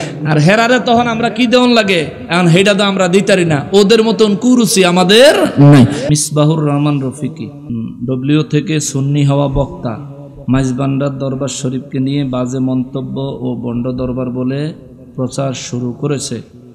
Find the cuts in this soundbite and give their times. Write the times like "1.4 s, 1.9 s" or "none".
6.0 s, 7.7 s